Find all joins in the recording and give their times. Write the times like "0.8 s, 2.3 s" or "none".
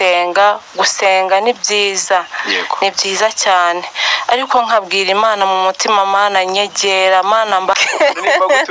7.7 s